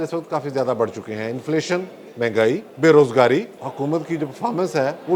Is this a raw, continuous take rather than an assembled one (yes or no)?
no